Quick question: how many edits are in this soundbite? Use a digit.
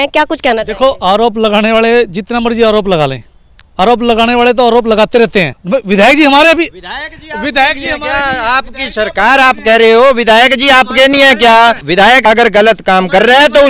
2